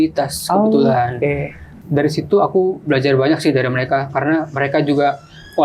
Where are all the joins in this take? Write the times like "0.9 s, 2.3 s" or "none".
1.8 s